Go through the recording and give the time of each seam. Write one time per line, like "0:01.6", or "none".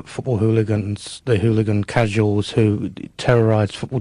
none